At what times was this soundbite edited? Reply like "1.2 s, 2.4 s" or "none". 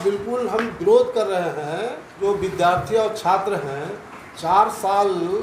2.1 s